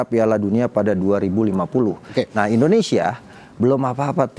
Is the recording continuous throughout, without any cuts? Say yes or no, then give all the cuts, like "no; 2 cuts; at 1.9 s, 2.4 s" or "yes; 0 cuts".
no; 1 cut; at 2.0 s